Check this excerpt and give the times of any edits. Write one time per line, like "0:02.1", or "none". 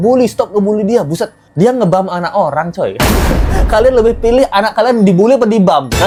none